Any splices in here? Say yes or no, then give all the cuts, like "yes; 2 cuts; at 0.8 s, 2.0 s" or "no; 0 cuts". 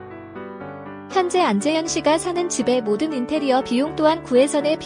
yes; 1 cut; at 1.1 s